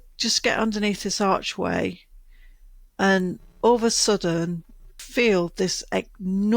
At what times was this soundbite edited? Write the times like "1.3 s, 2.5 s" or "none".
5.0 s